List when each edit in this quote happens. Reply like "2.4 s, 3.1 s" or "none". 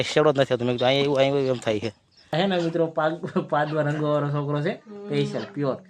2.3 s